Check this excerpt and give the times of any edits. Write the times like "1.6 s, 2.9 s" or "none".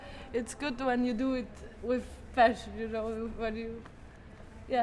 none